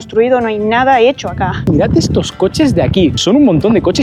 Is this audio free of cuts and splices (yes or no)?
no